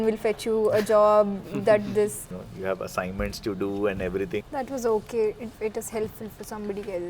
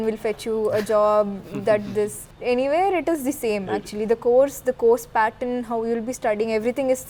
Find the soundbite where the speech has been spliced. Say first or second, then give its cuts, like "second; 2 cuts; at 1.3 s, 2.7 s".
first; 3 cuts; at 2.3 s, 4.5 s, 5.5 s